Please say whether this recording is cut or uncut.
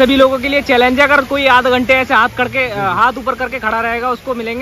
uncut